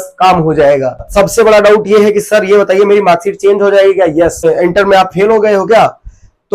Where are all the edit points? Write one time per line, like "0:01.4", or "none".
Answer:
0:01.1
0:04.4